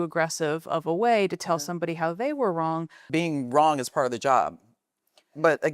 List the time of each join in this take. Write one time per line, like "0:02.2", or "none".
0:03.0